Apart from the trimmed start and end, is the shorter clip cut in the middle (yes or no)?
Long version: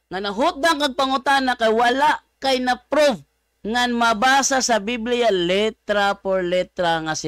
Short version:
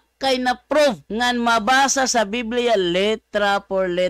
yes